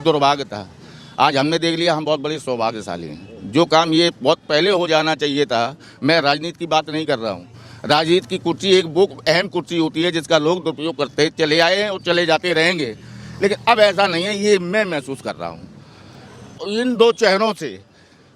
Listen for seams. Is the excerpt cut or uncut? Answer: cut